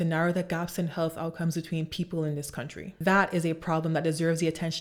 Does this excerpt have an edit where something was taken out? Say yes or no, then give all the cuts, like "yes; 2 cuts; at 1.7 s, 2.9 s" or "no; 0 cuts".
no; 0 cuts